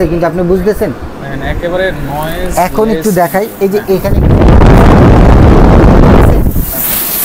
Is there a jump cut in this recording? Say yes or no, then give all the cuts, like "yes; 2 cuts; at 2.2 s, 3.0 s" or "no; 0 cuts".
no; 0 cuts